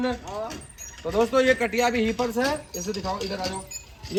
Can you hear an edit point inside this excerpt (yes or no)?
no